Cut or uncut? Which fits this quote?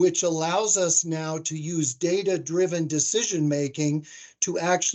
uncut